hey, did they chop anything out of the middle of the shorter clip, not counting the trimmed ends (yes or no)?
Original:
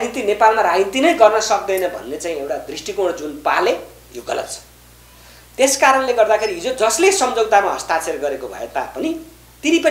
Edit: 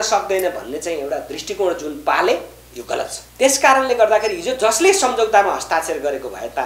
yes